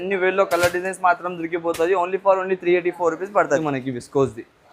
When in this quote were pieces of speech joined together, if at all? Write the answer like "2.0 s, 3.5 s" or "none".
3.6 s